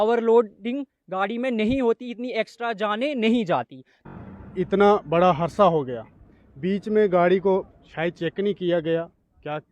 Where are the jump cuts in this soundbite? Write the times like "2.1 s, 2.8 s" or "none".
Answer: 4.2 s